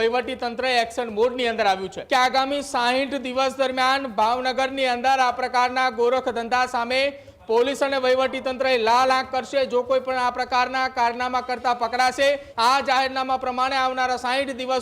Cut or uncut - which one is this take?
cut